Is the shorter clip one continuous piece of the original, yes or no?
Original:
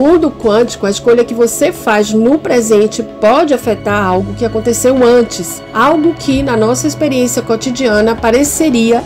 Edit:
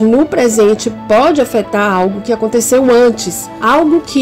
yes